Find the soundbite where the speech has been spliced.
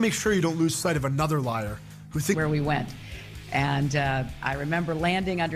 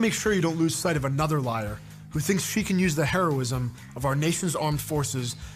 second; 1 cut; at 2.3 s

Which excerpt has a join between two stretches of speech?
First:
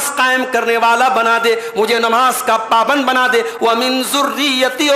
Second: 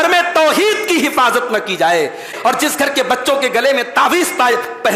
second; 1 cut; at 2.3 s

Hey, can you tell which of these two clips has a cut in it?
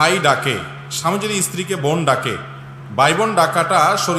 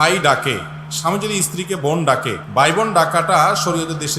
second; 1 cut; at 2.4 s

